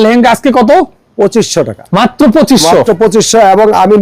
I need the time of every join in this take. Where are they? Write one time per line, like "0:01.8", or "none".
0:01.8